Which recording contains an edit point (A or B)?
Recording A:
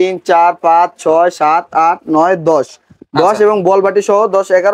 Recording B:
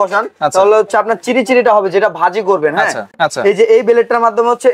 B